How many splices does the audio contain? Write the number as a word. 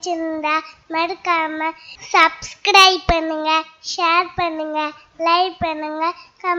zero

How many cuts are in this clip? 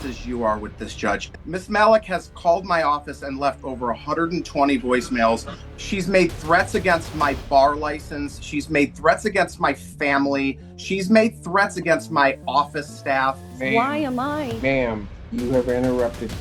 three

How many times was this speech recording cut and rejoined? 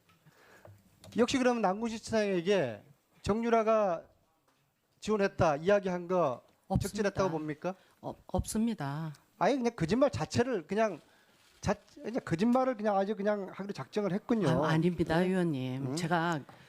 one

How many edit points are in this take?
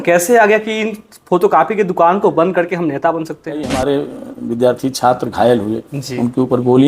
one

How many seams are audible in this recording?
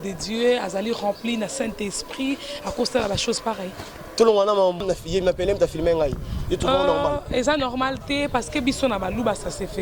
one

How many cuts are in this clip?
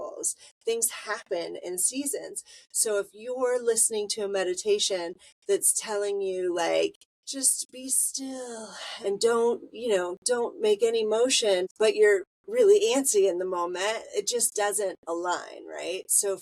two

